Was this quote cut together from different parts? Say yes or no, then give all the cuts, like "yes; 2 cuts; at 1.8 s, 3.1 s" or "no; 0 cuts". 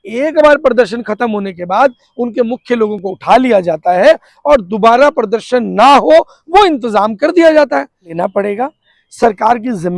yes; 1 cut; at 8.1 s